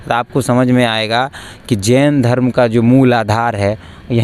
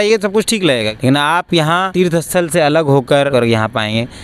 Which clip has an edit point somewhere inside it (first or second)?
second